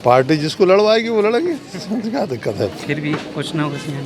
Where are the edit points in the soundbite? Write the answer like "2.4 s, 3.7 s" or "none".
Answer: none

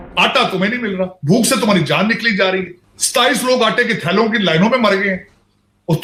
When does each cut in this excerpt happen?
none

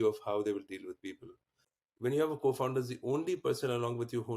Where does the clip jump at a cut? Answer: 1.6 s

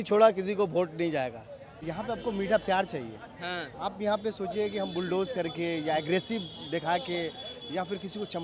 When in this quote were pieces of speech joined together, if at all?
1.8 s

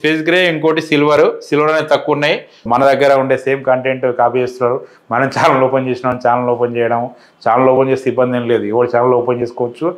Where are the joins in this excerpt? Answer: 2.7 s

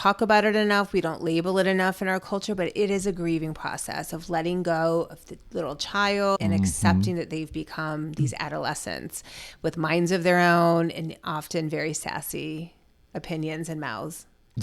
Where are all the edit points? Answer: 6.4 s

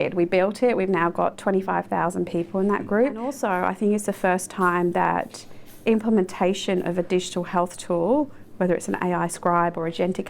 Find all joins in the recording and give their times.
3.4 s

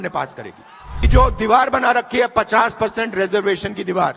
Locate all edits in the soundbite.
1.1 s

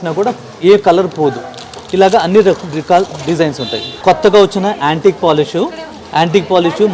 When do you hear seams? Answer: 3.9 s

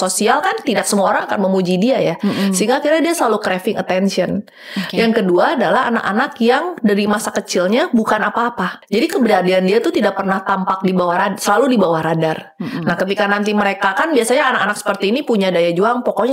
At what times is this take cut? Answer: none

